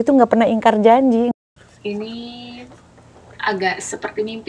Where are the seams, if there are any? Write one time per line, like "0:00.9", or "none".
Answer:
0:01.3